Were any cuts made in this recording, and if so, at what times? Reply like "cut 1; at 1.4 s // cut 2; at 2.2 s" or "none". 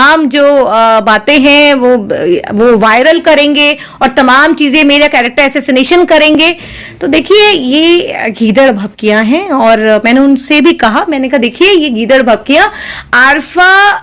none